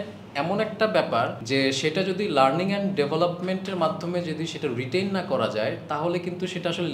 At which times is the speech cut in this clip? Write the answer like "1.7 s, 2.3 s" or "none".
1.4 s